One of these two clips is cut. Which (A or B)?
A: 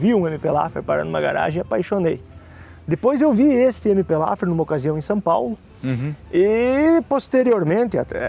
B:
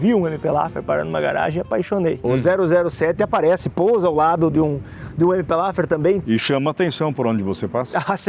B